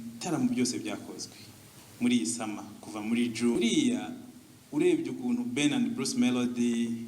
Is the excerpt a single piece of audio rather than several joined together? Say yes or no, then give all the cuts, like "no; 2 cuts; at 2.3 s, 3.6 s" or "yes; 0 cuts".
no; 1 cut; at 3.5 s